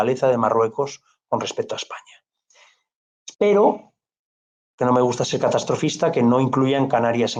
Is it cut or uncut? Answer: uncut